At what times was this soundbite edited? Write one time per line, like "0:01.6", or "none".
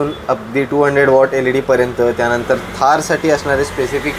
none